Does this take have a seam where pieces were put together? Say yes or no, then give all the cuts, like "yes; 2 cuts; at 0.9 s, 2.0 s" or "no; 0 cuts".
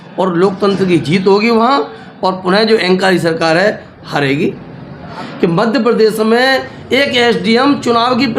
yes; 1 cut; at 5.2 s